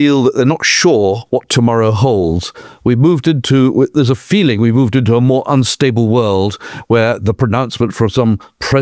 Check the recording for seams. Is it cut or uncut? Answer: cut